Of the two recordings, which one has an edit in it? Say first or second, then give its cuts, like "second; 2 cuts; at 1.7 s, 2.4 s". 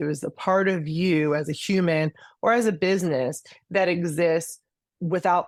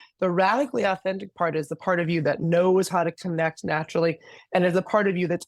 second; 1 cut; at 2.4 s